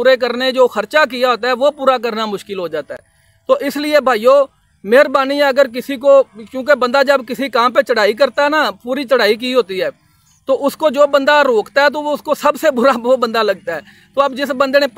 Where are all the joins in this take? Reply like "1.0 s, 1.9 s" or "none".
none